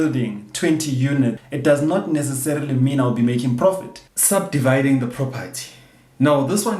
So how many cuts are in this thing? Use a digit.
2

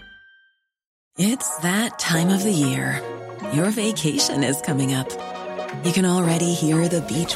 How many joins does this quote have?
1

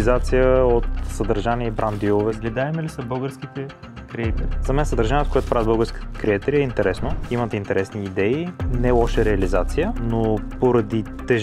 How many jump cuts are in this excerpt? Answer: 3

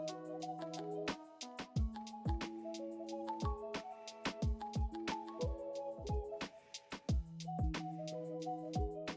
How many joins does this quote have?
0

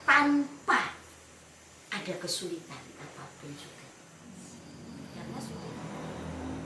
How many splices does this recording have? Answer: 1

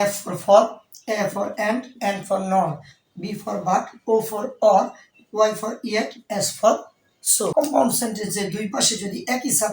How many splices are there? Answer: 1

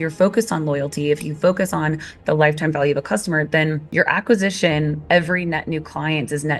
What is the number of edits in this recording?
0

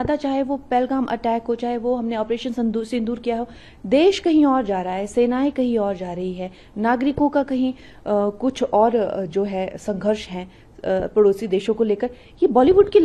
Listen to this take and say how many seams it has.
0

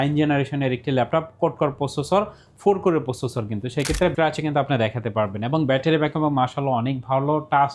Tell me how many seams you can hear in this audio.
1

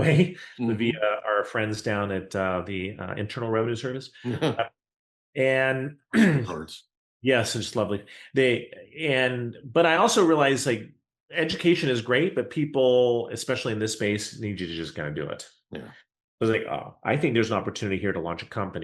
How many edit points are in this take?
0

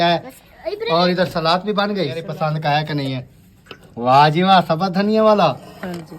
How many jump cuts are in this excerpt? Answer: 1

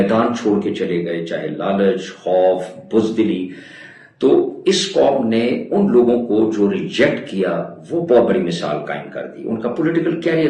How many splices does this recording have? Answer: 0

